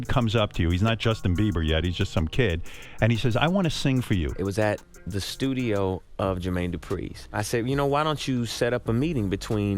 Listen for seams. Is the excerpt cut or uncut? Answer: uncut